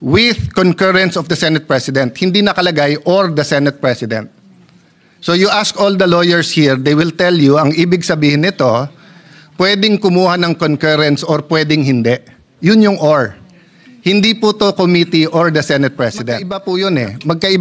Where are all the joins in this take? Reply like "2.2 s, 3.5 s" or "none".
16.5 s